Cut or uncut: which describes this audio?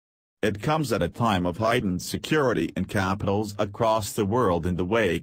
uncut